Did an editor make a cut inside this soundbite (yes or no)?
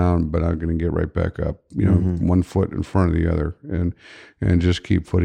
no